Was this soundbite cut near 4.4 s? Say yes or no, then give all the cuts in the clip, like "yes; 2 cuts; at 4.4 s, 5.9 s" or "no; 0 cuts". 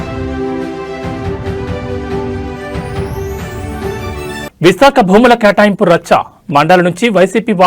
yes; 1 cut; at 4.4 s